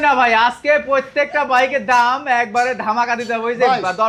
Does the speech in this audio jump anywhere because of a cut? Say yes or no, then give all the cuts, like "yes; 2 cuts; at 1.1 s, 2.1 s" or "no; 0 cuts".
no; 0 cuts